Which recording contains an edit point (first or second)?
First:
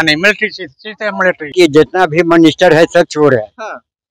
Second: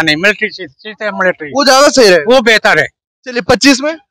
first